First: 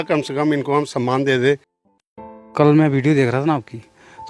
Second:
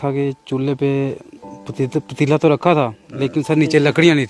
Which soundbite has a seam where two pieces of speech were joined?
first; 1 cut; at 2.0 s

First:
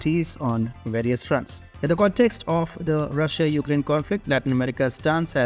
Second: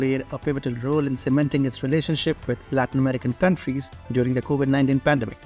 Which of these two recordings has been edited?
first; 1 cut; at 1.6 s

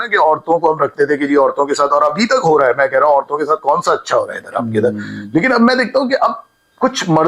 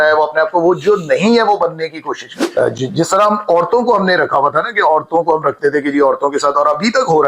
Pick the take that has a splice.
second; 1 cut; at 2.3 s

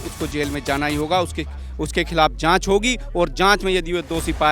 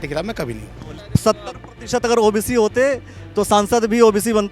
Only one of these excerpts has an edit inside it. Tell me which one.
second; 1 cut; at 1.0 s

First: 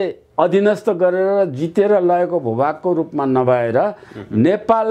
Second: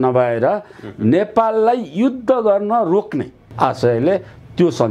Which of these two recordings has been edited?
second; 1 cut; at 3.4 s

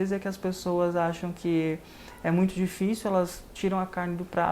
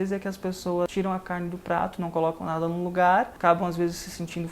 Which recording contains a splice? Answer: second; 2 cuts; at 0.9 s, 3.3 s

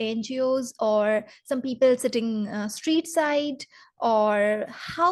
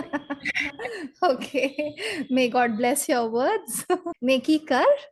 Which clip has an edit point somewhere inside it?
second; 1 cut; at 4.1 s

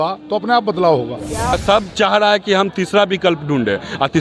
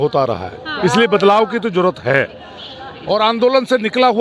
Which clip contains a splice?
first; 1 cut; at 1.5 s

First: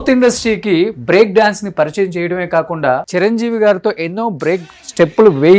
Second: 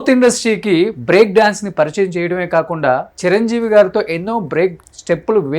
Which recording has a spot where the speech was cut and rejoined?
first; 1 cut; at 3.1 s

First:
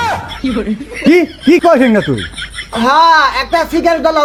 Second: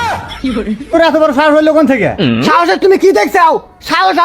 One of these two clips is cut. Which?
second; 1 cut; at 0.9 s

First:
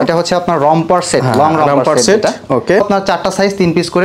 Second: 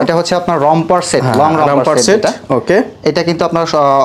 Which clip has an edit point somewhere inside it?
first; 1 cut; at 2.8 s

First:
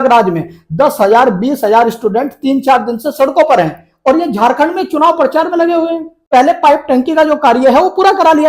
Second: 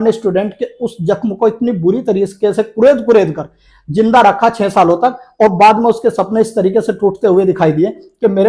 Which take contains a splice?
first; 1 cut; at 6.3 s

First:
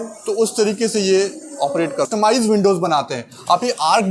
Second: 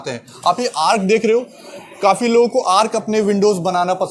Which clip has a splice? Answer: first; 1 cut; at 2.1 s

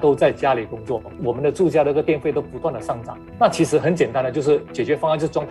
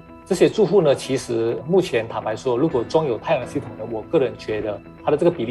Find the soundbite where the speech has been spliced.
first; 2 cuts; at 1.1 s, 3.3 s

